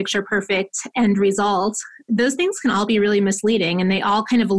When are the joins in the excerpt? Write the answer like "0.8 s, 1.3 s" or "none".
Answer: 1.9 s